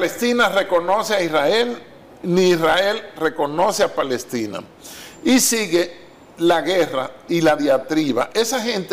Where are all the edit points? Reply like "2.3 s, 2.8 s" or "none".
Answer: none

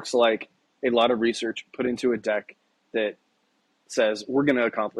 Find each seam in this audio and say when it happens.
none

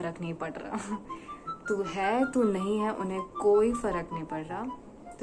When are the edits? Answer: none

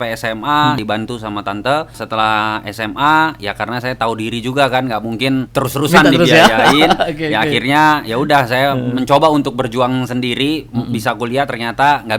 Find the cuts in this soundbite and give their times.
0.8 s, 1.9 s, 5.5 s

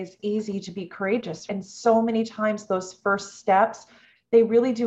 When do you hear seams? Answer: 1.4 s

